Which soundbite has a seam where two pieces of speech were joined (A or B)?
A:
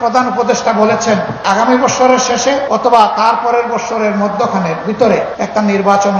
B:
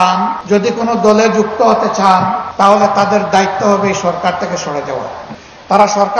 A